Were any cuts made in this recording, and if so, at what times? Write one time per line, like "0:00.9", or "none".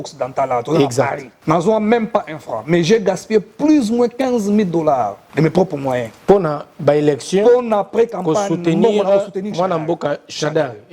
0:01.3
0:05.2
0:06.1